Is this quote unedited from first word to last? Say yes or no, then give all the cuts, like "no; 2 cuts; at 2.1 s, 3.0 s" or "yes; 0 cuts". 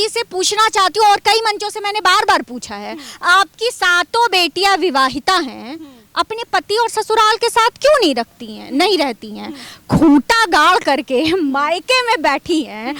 yes; 0 cuts